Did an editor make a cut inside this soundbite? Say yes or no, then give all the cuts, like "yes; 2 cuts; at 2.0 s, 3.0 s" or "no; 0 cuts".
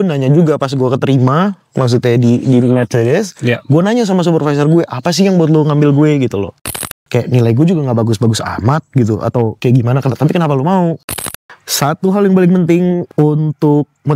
yes; 3 cuts; at 6.6 s, 11.2 s, 13.1 s